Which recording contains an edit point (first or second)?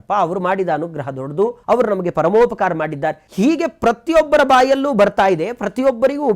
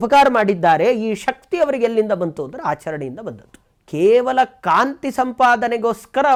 first